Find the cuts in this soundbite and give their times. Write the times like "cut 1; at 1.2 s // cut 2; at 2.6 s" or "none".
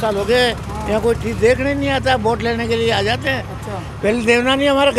none

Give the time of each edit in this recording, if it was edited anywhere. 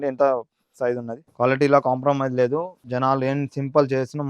cut 1; at 1.2 s // cut 2; at 2.8 s

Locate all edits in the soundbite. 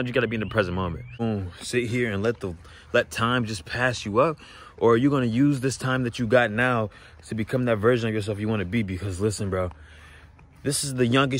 cut 1; at 1.2 s

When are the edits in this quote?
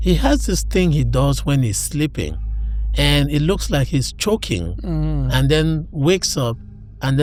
none

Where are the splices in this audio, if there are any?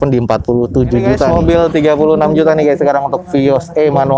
cut 1; at 1.3 s

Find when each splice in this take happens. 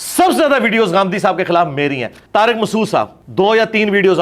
cut 1; at 2.1 s // cut 2; at 3.2 s

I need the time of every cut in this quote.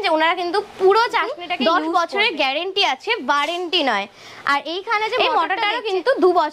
cut 1; at 1.5 s // cut 2; at 5.2 s

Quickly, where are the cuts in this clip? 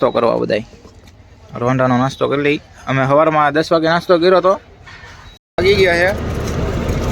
cut 1; at 5.5 s

